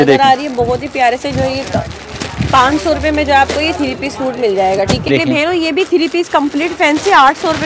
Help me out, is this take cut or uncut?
cut